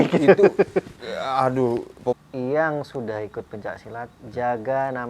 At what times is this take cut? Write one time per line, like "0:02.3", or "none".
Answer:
0:02.2